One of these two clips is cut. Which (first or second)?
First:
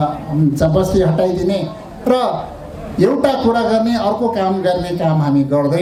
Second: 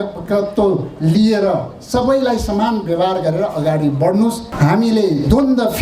second